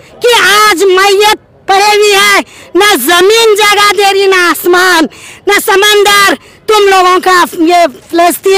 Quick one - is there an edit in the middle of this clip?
no; 0 cuts

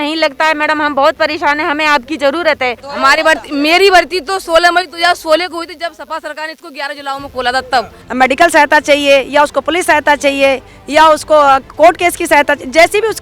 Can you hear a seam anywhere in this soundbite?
yes; 2 cuts; at 2.8 s, 8.0 s

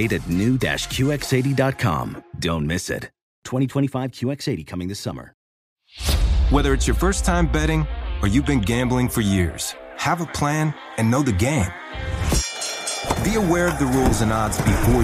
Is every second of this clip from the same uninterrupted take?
no; 1 cut; at 5.5 s

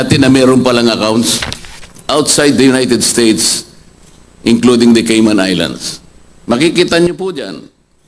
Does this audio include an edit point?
yes; 1 cut; at 1.5 s

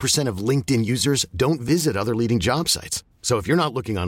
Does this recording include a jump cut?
no; 0 cuts

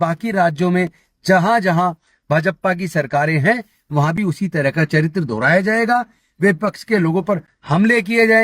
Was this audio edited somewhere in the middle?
no; 0 cuts

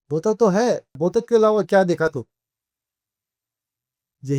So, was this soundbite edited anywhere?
yes; 1 cut; at 1.0 s

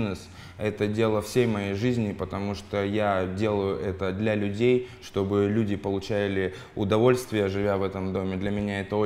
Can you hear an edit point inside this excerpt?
no; 0 cuts

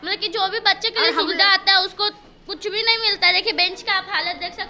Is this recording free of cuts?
yes; 0 cuts

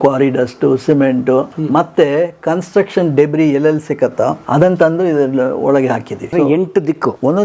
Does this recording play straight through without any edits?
no; 3 cuts; at 1.7 s, 4.4 s, 6.7 s

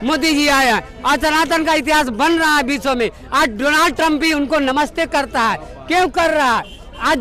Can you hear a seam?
no; 0 cuts

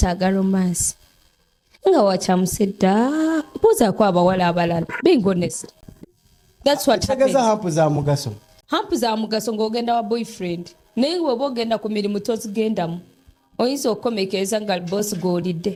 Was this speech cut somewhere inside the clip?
no; 0 cuts

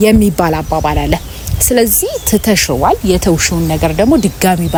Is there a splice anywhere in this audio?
no; 0 cuts

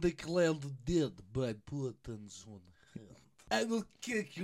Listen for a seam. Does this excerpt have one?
yes; 1 cut; at 3.5 s

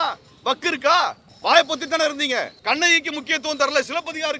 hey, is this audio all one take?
no; 2 cuts; at 1.3 s, 2.5 s

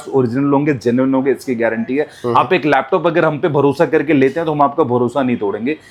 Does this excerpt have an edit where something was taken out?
no; 0 cuts

